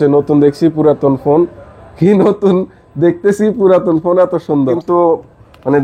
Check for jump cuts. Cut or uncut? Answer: cut